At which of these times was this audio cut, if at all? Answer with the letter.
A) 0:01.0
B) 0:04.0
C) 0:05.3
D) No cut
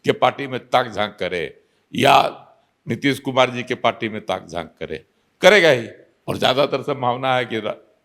D